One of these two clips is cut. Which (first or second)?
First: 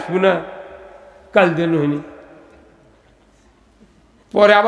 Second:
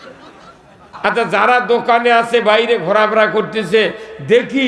second